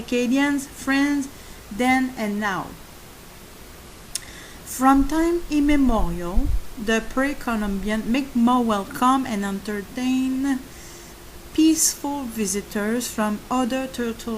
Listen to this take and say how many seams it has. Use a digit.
1